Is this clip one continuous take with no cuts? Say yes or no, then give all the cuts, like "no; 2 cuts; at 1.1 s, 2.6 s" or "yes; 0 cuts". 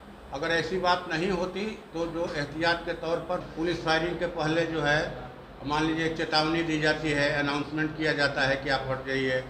no; 1 cut; at 3.5 s